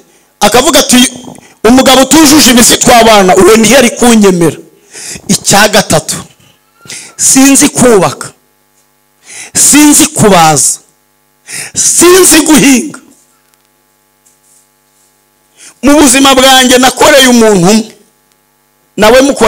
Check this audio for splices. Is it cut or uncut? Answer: uncut